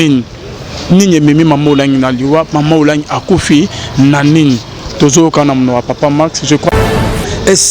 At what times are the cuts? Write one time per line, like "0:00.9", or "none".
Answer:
0:06.7